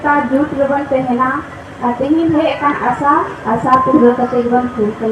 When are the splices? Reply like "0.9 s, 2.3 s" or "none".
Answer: none